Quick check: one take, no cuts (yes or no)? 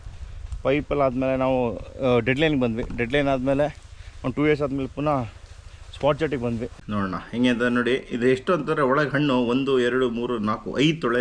no